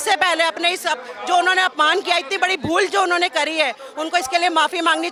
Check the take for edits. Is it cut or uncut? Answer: uncut